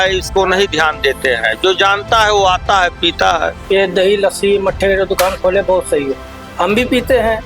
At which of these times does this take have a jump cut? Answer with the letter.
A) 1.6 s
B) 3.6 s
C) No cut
B